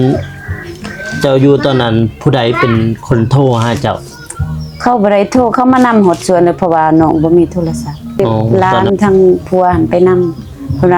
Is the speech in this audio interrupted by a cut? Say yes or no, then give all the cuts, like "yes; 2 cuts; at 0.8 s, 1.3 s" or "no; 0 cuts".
yes; 1 cut; at 8.4 s